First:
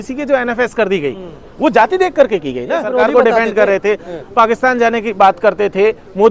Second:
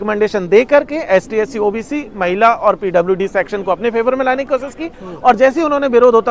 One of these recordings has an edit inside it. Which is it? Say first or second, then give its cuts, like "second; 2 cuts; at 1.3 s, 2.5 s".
first; 1 cut; at 2.9 s